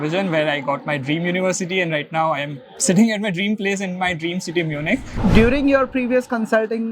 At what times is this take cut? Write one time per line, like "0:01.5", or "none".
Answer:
0:05.1